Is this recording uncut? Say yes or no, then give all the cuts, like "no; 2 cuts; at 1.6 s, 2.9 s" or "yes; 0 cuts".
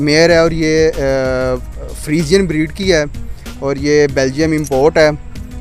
yes; 0 cuts